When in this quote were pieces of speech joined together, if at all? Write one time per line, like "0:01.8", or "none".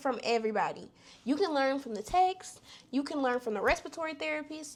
none